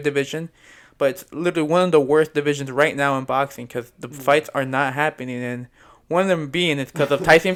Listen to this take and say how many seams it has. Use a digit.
0